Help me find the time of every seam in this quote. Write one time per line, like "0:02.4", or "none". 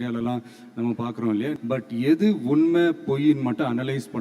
0:01.6